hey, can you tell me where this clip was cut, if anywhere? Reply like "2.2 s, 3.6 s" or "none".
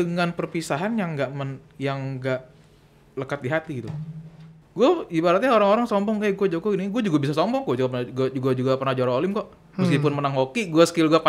4.6 s